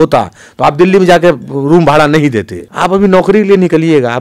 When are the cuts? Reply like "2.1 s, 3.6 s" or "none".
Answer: 2.6 s